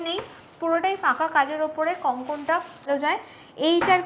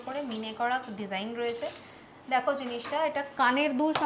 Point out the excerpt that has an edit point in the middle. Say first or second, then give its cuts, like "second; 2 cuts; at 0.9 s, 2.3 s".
first; 1 cut; at 2.9 s